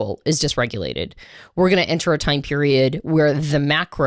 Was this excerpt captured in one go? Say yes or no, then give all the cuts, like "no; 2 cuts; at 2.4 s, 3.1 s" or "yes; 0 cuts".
yes; 0 cuts